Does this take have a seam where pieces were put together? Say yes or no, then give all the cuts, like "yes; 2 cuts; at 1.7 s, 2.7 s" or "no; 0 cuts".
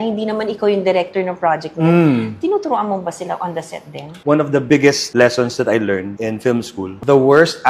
yes; 1 cut; at 4.2 s